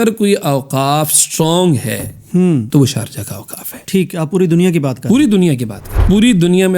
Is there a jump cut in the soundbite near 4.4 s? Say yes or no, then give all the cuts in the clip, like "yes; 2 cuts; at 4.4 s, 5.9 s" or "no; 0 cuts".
no; 2 cuts; at 2.7 s, 6.0 s